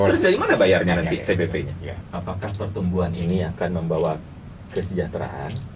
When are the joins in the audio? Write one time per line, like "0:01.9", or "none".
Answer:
0:02.0